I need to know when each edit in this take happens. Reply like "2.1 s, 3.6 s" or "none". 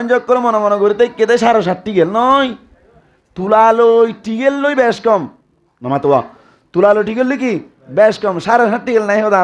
none